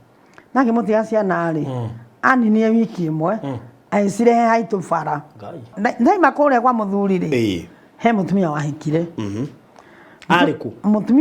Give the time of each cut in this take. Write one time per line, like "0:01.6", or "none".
0:05.7